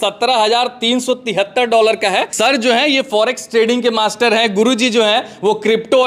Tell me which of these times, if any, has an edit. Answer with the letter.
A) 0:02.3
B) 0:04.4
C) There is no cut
A